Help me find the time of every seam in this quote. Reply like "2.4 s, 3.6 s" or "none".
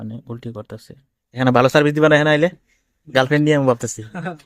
1.3 s

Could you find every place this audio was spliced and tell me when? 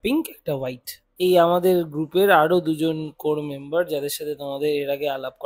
1.0 s

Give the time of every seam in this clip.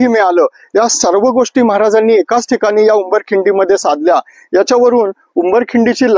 none

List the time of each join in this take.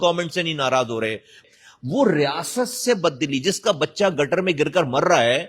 1.4 s

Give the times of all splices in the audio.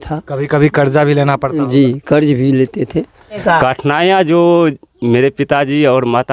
3.4 s

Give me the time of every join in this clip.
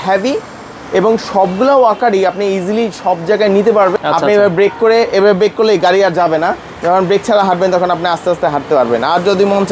3.9 s

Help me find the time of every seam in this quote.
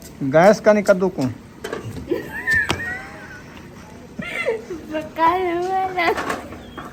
none

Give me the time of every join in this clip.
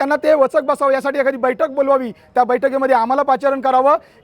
none

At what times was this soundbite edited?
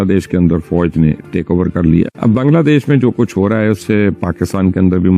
2.1 s

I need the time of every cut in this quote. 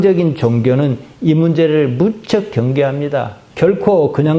3.4 s

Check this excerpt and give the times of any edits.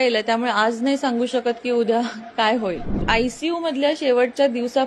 2.9 s

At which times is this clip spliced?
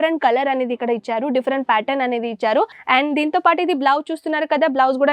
2.8 s

